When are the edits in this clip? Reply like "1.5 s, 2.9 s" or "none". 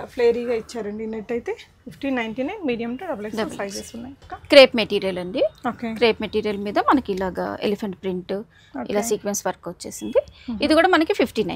none

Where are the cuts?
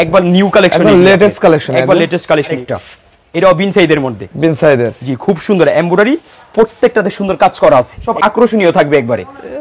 2.6 s, 8.1 s

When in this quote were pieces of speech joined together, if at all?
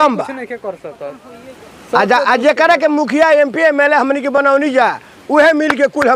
none

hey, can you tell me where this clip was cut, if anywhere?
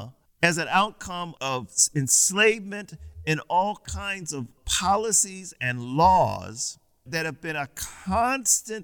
4.6 s

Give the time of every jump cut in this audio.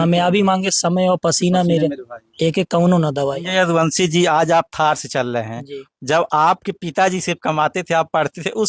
3.4 s

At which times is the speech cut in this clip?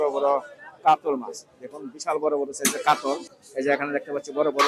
3.4 s

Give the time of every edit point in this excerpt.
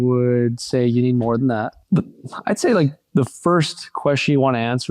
1.8 s

